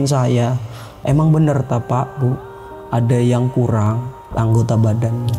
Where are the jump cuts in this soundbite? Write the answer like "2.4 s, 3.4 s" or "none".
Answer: 0.9 s, 4.2 s